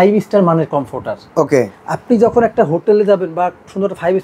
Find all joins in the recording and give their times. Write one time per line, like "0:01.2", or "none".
none